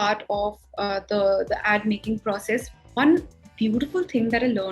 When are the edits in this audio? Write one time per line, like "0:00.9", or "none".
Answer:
0:02.7